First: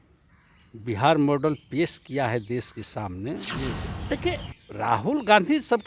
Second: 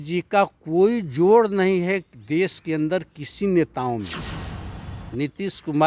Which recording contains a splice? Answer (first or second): first